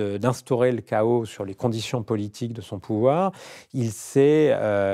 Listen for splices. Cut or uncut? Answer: uncut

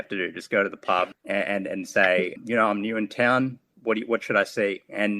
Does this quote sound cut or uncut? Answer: cut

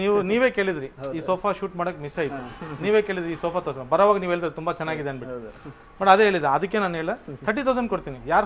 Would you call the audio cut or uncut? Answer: uncut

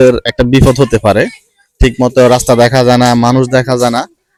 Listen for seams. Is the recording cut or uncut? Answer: uncut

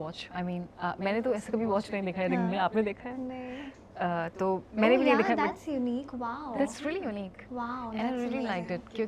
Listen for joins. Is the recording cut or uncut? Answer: uncut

